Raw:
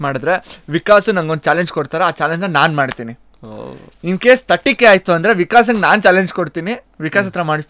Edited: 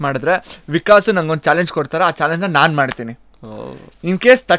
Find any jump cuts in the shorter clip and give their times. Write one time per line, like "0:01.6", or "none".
none